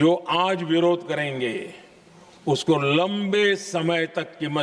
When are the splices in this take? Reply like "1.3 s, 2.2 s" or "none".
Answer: none